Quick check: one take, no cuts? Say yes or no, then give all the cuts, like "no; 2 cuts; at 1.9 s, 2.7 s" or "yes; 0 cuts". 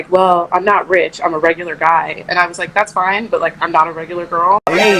yes; 0 cuts